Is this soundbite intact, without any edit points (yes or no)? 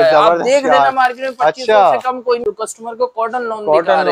no